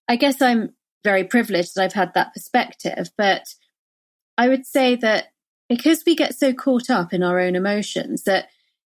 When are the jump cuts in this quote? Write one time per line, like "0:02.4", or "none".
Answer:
0:01.0